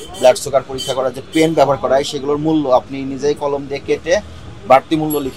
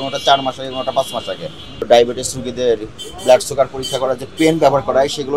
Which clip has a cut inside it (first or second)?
second